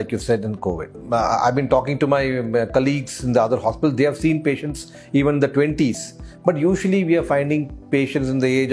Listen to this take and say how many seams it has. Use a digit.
0